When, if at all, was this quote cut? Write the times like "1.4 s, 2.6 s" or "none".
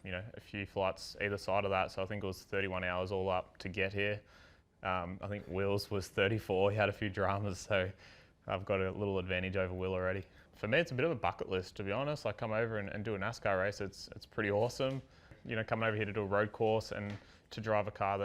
10.5 s, 15.4 s